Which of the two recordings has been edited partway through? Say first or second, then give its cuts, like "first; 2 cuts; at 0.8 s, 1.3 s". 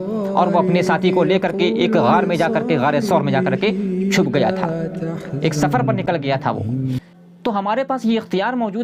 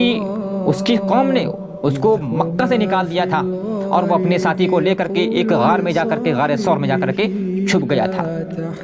first; 1 cut; at 7.0 s